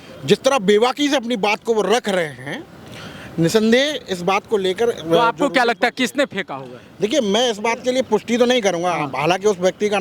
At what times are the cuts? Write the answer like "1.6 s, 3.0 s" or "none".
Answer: none